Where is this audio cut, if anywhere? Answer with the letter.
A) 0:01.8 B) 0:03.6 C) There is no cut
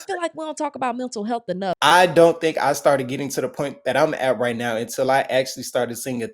A